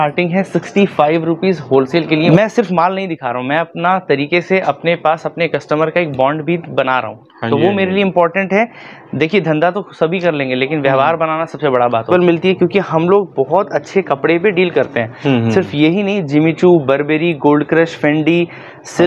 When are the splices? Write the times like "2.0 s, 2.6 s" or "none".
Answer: 2.3 s, 12.1 s